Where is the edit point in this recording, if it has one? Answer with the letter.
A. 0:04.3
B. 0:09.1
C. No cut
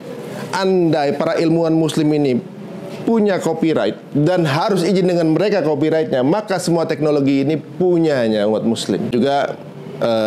B